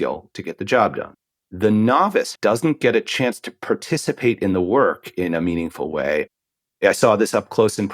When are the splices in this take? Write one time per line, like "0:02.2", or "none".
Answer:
0:01.1
0:02.3
0:06.3